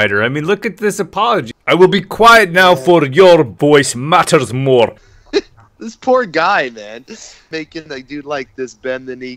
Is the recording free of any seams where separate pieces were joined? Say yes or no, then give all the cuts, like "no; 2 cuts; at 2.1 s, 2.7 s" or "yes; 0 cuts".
no; 2 cuts; at 1.5 s, 5.1 s